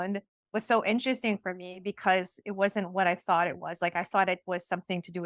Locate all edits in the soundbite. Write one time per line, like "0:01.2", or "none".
none

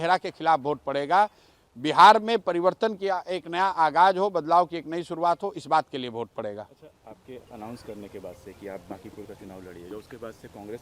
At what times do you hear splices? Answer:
none

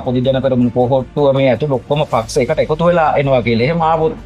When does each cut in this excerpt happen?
none

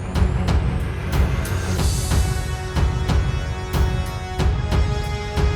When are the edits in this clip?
none

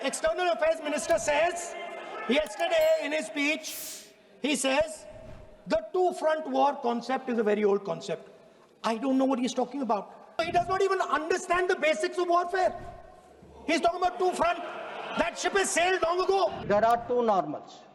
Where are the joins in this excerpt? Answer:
0:10.4
0:16.6

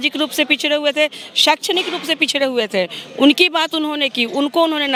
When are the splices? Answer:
none

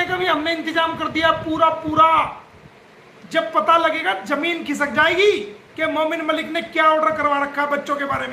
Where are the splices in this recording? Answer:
none

